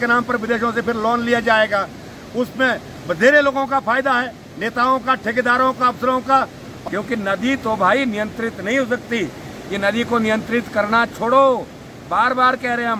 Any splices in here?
yes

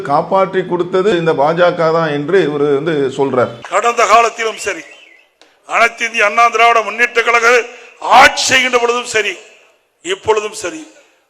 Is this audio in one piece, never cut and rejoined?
no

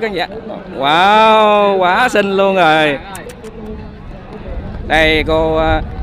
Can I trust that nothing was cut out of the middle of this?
yes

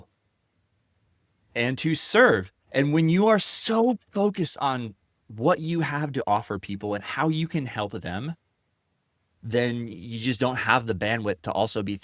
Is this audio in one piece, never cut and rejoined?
yes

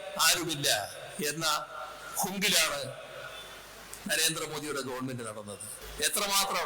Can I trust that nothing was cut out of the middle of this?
no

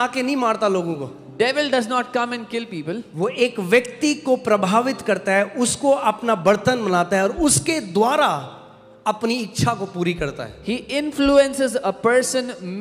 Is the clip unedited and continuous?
yes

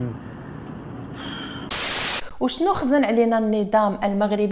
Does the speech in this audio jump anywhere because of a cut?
yes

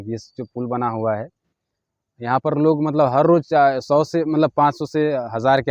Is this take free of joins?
yes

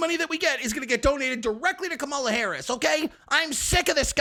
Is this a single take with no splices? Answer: yes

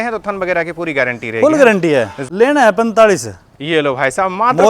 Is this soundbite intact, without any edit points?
no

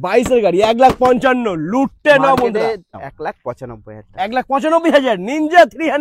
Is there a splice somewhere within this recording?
yes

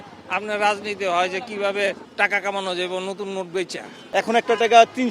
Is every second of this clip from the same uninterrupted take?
no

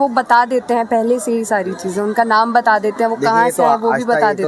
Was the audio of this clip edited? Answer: no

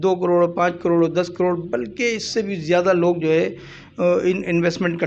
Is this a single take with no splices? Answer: yes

